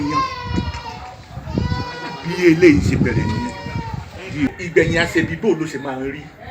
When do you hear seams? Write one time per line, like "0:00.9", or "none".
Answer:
0:04.5